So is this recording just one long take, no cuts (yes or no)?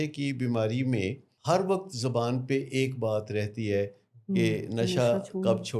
no